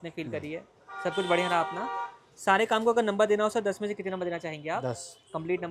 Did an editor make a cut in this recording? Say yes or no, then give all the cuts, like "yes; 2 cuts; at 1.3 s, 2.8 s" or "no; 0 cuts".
no; 0 cuts